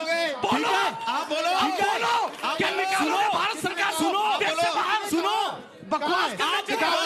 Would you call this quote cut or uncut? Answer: uncut